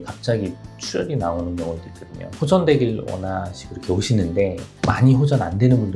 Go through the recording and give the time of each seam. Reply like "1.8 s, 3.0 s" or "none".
2.3 s, 4.7 s